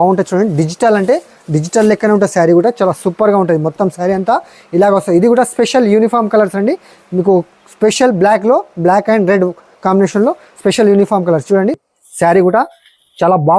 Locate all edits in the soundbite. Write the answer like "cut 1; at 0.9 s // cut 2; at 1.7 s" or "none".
cut 1; at 11.9 s